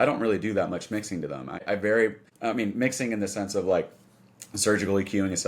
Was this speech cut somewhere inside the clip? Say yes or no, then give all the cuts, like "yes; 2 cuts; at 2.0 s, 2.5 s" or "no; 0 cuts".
yes; 2 cuts; at 1.6 s, 2.3 s